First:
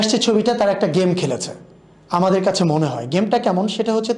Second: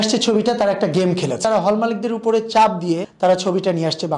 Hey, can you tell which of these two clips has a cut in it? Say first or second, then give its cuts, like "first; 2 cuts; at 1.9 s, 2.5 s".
second; 2 cuts; at 1.4 s, 3.1 s